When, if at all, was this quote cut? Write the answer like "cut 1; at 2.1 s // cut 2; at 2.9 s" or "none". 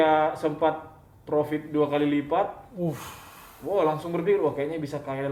none